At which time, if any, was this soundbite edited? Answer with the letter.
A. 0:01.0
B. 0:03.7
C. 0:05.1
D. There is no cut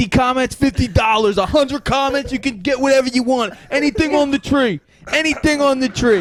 D